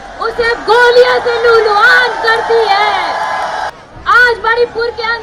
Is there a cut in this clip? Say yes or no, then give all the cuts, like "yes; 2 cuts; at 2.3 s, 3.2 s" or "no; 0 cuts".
yes; 1 cut; at 3.7 s